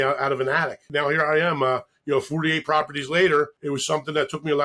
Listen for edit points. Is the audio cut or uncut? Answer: cut